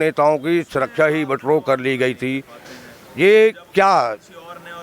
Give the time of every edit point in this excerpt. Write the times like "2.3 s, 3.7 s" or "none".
none